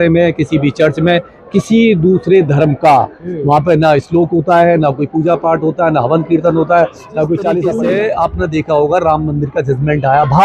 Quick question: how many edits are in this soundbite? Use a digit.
1